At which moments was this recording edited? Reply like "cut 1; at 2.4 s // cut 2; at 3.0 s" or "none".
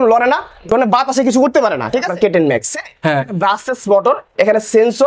cut 1; at 2.1 s